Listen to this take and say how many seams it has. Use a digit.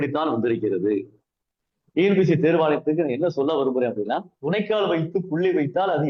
0